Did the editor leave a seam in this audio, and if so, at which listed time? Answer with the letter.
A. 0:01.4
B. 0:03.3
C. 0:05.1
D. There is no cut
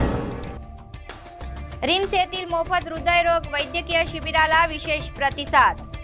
A